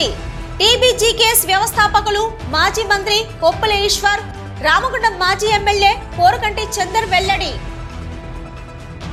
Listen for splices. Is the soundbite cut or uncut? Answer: uncut